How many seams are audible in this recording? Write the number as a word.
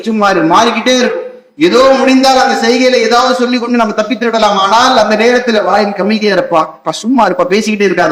zero